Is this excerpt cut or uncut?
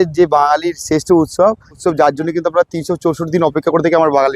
cut